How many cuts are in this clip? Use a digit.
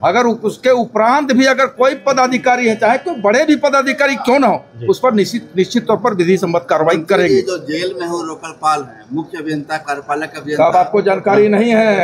0